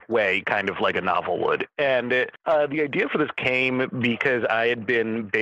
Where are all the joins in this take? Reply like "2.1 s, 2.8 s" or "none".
none